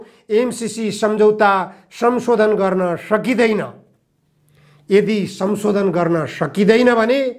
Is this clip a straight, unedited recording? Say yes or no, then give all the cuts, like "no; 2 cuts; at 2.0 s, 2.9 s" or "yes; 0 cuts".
yes; 0 cuts